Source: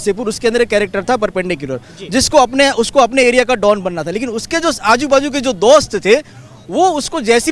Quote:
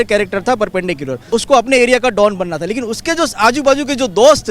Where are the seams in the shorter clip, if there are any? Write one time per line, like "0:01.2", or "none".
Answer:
0:01.3